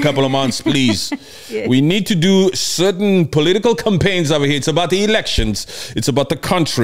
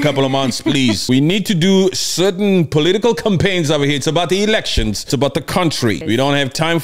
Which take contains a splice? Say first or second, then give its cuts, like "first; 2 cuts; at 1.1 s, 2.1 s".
second; 3 cuts; at 1.0 s, 5.0 s, 6.0 s